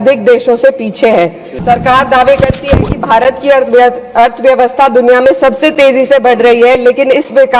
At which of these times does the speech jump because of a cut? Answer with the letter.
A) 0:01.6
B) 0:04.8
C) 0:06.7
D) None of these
A